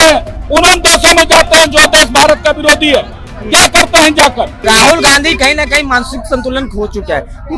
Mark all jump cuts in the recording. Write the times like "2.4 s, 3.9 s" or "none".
4.6 s